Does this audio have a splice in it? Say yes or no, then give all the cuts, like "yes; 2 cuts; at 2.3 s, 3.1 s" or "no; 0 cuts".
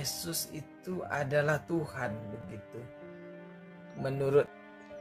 no; 0 cuts